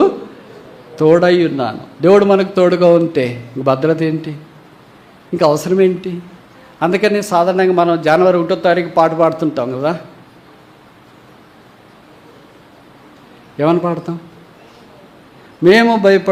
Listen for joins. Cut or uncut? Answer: uncut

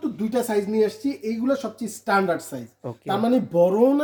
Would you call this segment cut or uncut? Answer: uncut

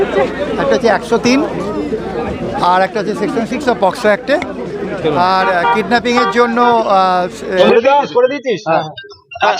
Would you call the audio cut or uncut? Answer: cut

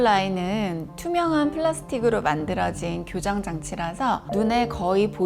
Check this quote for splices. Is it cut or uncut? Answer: uncut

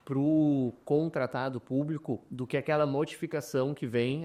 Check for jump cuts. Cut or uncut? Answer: uncut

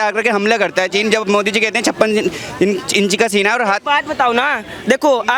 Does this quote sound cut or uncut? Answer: uncut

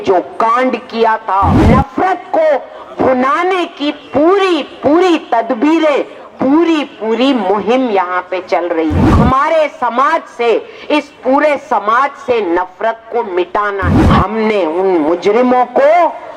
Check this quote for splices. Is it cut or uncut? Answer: cut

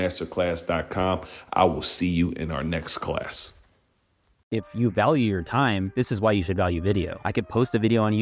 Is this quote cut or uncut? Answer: cut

